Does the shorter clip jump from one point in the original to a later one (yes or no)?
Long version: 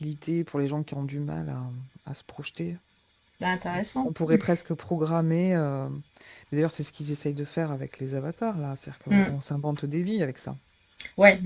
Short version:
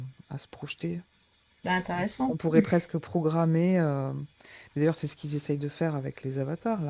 no